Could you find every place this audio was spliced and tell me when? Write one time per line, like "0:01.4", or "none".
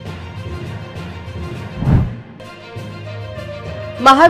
none